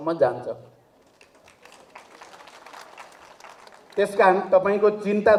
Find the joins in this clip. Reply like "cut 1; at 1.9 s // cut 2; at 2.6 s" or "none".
none